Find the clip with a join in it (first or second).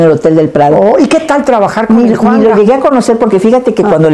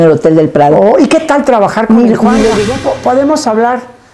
second